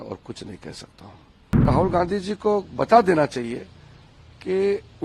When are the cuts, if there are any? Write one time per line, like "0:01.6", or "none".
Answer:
0:01.7